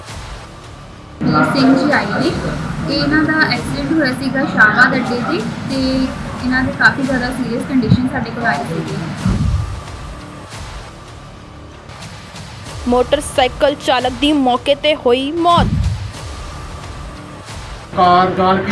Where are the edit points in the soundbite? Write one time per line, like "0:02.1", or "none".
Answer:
0:01.1